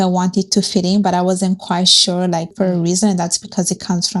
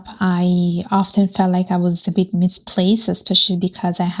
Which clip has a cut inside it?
first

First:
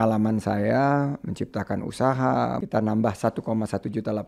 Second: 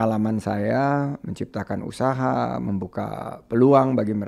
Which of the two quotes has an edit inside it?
first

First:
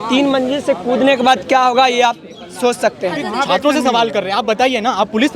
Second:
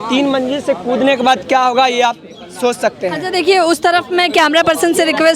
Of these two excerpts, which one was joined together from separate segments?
first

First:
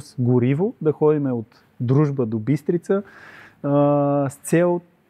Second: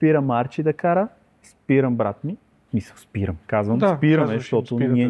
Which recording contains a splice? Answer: second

